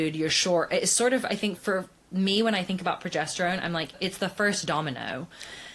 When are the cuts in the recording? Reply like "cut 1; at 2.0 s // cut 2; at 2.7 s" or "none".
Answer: cut 1; at 1.6 s // cut 2; at 3.9 s